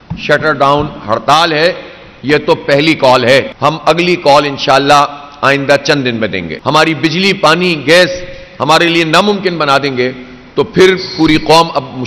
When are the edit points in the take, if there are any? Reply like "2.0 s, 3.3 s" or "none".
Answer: 3.5 s, 6.5 s